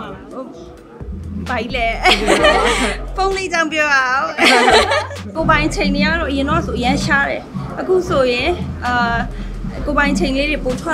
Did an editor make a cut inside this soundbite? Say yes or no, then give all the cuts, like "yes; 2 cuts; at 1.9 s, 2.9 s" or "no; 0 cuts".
yes; 1 cut; at 5.2 s